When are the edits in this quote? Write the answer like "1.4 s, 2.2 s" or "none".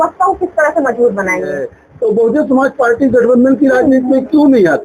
1.8 s

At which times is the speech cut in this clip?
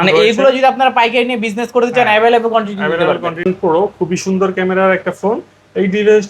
3.5 s

